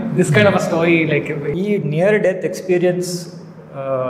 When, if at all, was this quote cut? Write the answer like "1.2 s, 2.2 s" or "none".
1.5 s